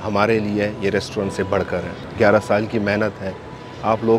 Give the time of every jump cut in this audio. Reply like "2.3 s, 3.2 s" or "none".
2.0 s